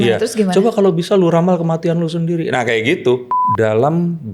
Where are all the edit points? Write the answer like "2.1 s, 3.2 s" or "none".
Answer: 3.4 s